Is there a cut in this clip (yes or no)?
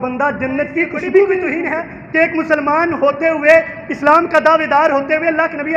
yes